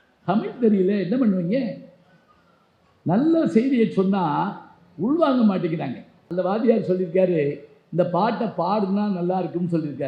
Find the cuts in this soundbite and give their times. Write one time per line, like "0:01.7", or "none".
0:06.2